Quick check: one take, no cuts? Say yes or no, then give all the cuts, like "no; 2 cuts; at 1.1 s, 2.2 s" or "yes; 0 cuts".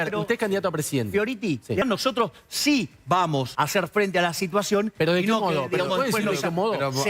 no; 2 cuts; at 1.8 s, 3.5 s